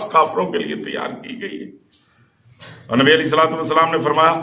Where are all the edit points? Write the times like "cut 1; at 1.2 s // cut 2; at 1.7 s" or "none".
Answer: none